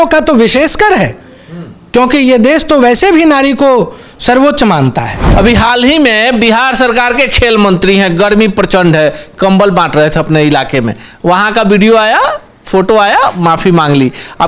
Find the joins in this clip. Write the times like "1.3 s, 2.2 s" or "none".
5.2 s